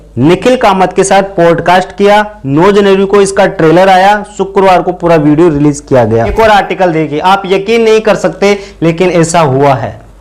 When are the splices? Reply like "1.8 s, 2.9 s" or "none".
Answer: 6.3 s